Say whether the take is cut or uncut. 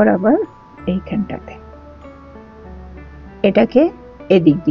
cut